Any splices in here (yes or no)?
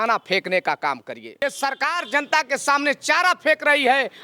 yes